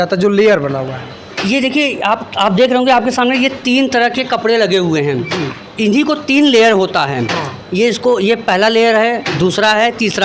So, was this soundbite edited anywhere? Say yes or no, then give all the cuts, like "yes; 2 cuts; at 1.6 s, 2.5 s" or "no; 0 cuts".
no; 0 cuts